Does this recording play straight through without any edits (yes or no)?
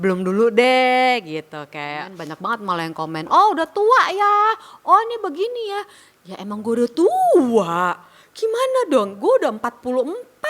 no